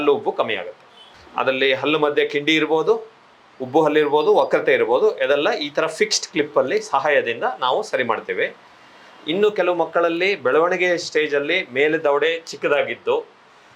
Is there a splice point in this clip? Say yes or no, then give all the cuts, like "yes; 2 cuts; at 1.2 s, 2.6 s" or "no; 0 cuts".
no; 0 cuts